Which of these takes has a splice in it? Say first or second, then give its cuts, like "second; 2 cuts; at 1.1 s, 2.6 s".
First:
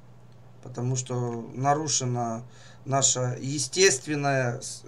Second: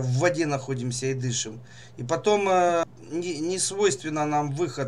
second; 1 cut; at 2.8 s